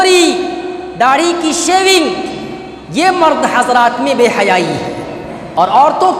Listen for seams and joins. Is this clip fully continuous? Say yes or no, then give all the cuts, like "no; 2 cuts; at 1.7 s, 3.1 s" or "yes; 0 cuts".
yes; 0 cuts